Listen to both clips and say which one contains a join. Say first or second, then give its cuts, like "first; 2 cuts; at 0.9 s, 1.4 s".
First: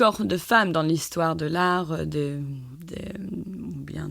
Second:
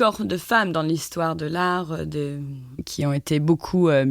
second; 1 cut; at 2.8 s